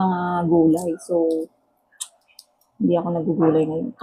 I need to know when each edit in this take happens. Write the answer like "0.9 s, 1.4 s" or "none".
none